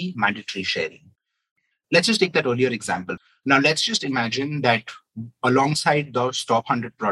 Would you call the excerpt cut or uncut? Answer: cut